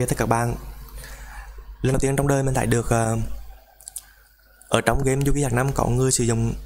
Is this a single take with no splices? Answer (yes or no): no